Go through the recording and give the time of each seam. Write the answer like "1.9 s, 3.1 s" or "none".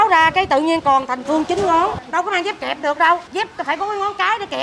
2.0 s, 3.3 s